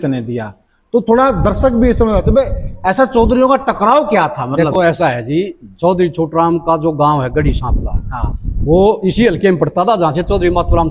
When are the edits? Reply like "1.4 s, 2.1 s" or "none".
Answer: none